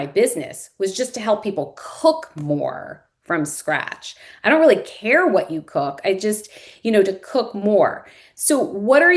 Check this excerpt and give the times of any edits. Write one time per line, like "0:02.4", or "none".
none